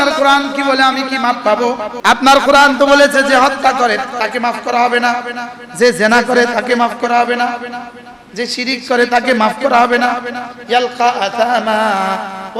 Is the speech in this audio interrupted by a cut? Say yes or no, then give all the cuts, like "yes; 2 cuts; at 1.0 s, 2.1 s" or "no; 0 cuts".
yes; 1 cut; at 1.9 s